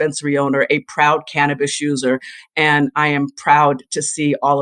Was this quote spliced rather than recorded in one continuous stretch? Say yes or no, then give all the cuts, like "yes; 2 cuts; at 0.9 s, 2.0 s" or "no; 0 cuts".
no; 0 cuts